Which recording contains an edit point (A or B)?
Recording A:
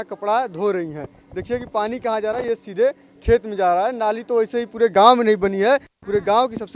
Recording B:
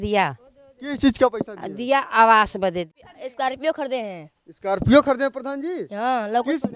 B